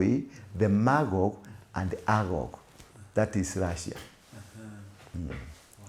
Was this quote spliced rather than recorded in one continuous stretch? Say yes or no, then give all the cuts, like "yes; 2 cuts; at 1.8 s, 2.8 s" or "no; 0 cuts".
no; 0 cuts